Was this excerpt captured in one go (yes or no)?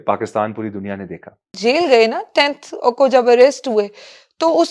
no